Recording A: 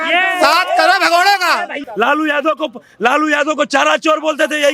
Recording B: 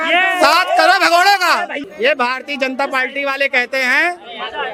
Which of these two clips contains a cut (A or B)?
A